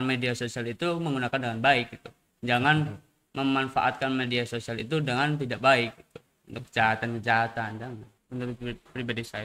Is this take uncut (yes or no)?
no